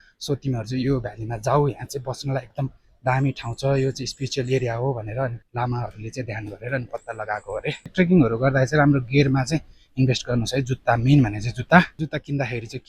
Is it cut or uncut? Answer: cut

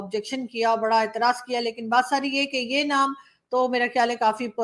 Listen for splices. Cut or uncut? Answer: uncut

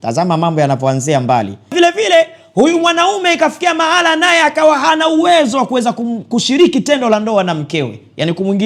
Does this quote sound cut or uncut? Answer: cut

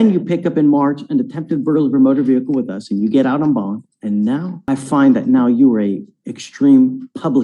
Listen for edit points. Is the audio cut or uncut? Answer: cut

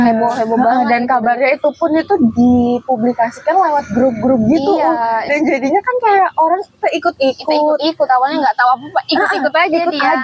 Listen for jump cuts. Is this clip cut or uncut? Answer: uncut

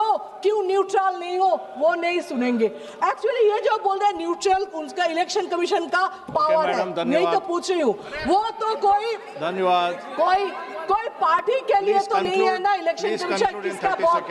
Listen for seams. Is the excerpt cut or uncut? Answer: uncut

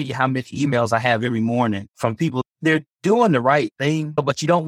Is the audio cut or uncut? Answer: cut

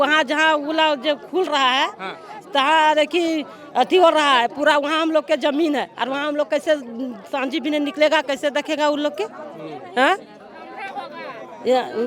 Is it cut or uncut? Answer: uncut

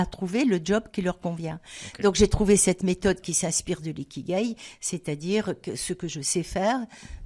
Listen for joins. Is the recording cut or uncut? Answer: uncut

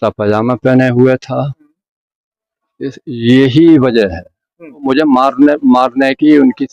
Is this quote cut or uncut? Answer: cut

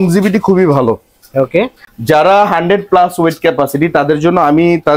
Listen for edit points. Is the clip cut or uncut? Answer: uncut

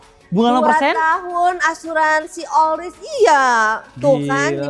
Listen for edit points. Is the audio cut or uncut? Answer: uncut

